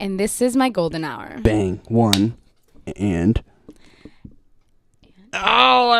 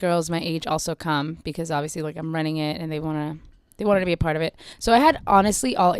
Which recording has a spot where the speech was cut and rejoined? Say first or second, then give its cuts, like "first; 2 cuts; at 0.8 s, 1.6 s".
second; 1 cut; at 4.7 s